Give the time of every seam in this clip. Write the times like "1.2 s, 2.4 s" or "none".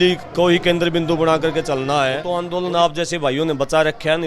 2.2 s